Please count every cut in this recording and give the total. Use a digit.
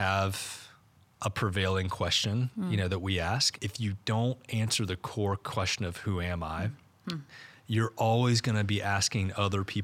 2